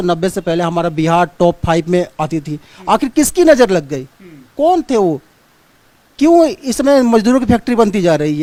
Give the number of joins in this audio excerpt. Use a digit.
0